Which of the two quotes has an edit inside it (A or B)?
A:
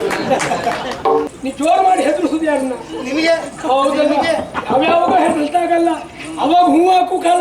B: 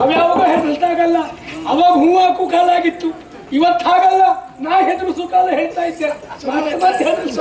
A